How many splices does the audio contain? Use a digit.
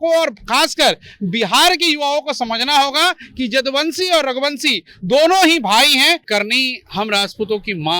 1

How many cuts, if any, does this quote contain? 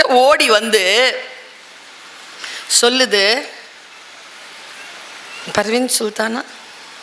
0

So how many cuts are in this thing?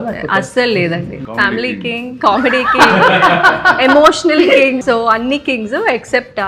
2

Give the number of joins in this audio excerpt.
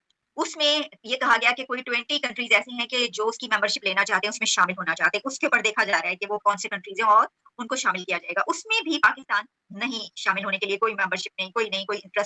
0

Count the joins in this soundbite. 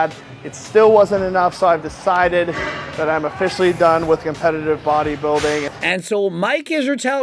1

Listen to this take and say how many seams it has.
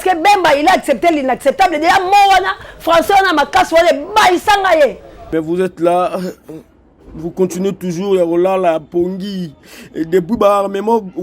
1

